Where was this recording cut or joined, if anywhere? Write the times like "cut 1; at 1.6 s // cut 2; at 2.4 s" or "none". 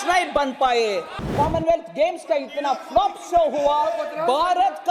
cut 1; at 1.3 s